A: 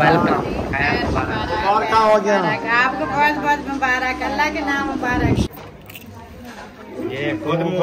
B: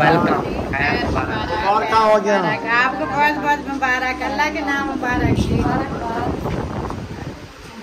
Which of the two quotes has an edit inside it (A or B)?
A